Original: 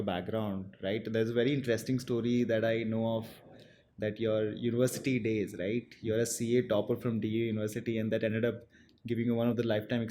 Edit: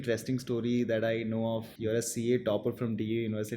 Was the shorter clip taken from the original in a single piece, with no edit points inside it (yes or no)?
no